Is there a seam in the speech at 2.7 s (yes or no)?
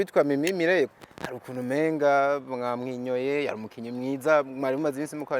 no